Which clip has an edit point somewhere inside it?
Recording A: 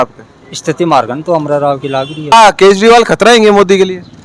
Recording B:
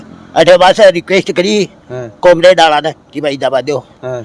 A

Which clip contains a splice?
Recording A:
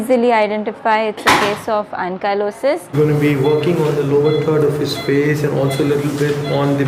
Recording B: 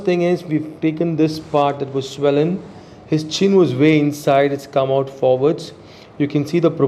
A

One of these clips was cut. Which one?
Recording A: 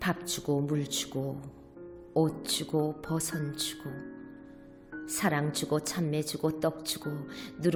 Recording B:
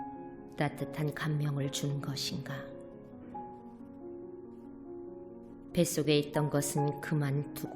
B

